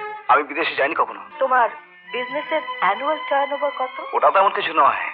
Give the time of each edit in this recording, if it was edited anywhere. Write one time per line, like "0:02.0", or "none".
0:01.2